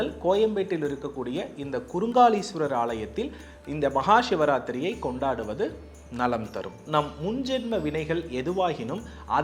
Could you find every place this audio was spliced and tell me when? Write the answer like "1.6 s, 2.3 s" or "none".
6.8 s